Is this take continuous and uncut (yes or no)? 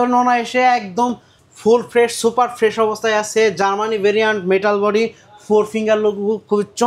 yes